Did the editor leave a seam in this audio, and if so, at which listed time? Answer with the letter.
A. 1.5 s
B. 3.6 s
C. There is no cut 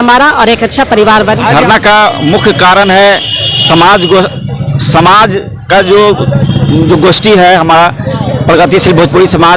A